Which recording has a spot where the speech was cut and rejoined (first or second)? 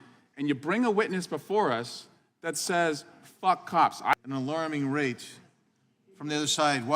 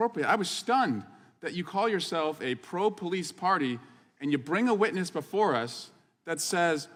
first